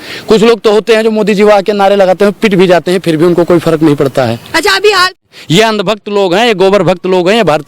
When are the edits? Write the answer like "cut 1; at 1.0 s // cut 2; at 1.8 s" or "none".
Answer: cut 1; at 5.2 s